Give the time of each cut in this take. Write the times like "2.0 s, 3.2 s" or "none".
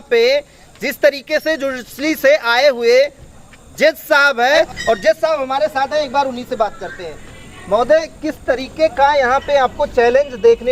4.6 s